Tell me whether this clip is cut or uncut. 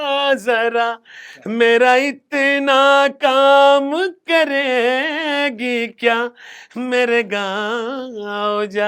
uncut